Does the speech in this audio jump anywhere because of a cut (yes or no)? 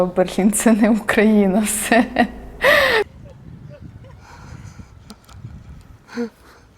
no